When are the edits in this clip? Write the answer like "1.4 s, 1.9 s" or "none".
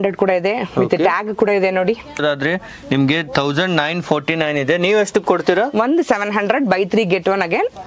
2.2 s

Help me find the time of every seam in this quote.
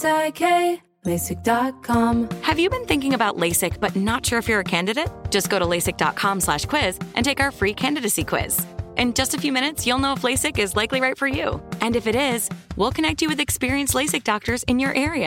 2.1 s

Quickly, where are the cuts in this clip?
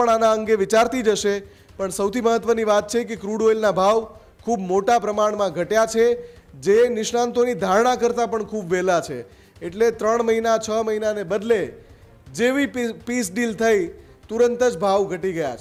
none

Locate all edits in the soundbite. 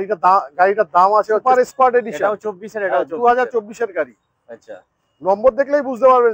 1.4 s

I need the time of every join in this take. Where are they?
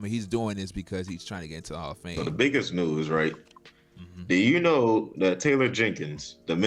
2.1 s

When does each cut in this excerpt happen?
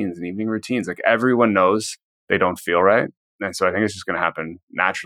none

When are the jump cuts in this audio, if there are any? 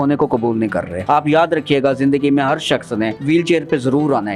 0.9 s, 3.2 s

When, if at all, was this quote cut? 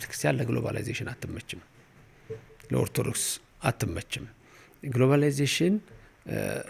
none

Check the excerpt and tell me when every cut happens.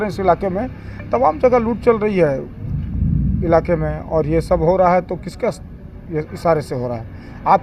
none

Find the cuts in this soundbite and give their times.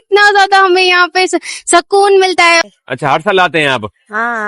2.6 s

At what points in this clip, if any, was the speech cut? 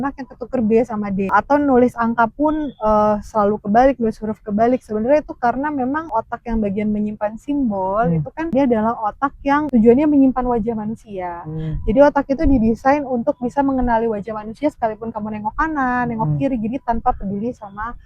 1.3 s, 6.1 s, 8.5 s, 9.7 s

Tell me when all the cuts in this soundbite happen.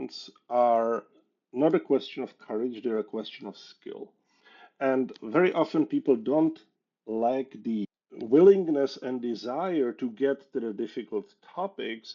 5.1 s

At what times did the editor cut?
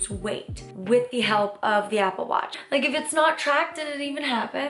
2.5 s

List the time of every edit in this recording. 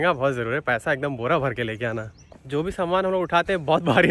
2.3 s

